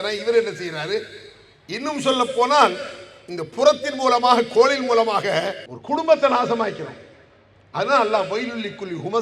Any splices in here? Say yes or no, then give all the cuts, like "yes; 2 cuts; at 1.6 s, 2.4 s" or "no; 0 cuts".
no; 0 cuts